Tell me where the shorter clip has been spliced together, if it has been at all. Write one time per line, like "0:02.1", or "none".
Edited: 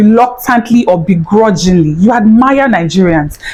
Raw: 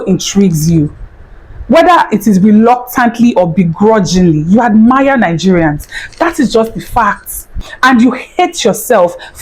none